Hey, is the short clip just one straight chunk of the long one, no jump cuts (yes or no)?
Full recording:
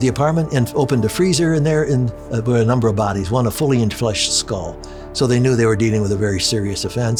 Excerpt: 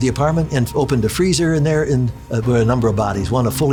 yes